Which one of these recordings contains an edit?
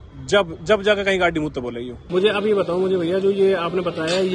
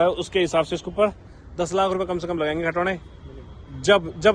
first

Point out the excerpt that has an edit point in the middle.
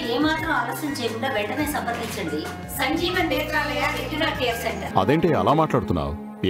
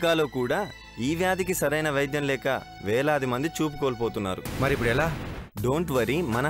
first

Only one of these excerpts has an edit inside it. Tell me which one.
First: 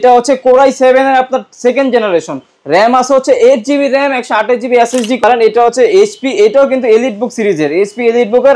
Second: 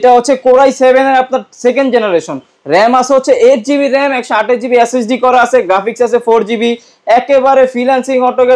first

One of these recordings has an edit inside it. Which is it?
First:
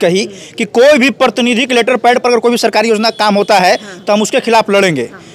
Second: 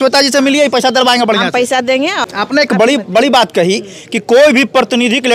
second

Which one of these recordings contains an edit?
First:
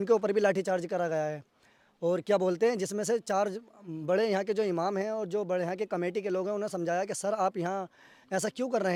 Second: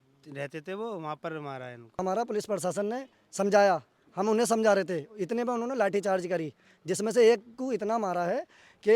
second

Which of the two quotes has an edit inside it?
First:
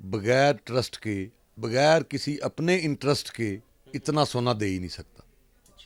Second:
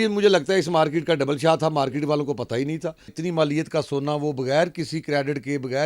second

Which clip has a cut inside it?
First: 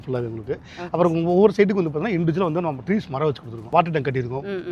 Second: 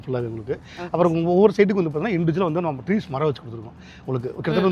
first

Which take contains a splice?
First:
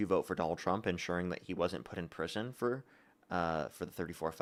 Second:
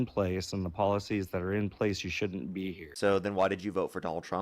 second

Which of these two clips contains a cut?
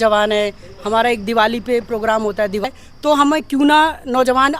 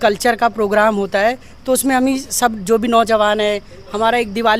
first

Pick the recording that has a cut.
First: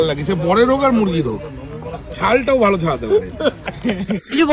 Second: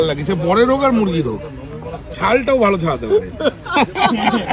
first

